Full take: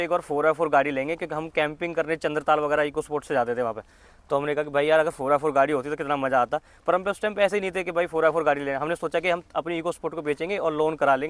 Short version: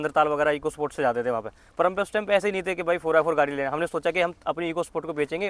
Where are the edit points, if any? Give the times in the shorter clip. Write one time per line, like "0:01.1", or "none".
0:01.6